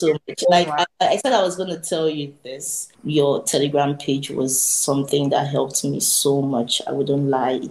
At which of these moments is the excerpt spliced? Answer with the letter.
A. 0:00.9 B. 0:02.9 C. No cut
B